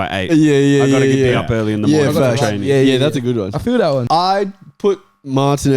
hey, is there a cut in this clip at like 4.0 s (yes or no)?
yes